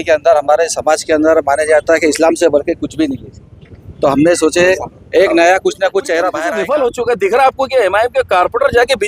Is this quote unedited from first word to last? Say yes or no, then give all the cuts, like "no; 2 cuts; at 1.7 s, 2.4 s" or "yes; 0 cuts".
no; 1 cut; at 6.5 s